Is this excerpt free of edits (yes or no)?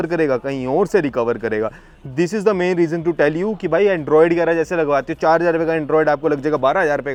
yes